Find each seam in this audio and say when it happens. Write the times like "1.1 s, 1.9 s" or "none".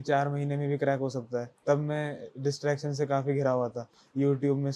none